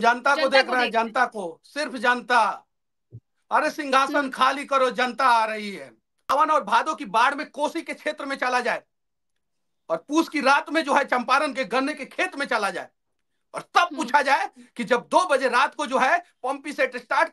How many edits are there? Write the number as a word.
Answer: one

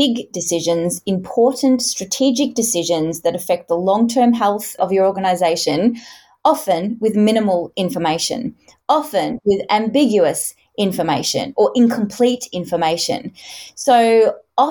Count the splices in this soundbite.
one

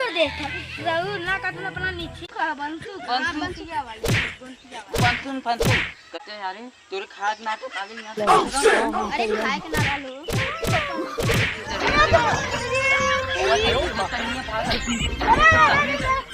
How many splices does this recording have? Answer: three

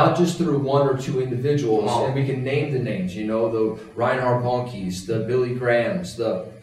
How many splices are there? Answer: zero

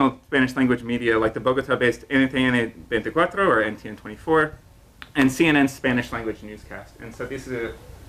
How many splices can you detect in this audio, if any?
zero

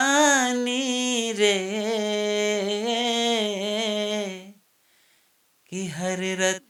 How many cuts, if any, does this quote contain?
zero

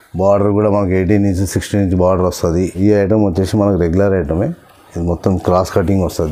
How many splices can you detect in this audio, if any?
one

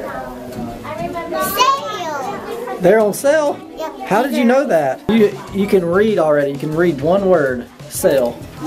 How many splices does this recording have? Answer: one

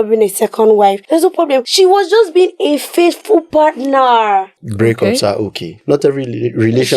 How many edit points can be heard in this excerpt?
three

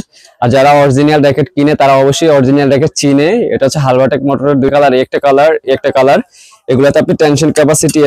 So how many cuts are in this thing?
zero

